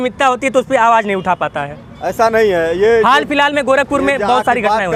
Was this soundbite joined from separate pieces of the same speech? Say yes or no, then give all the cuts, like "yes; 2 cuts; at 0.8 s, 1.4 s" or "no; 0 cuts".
no; 0 cuts